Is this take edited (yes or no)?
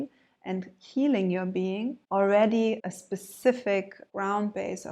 yes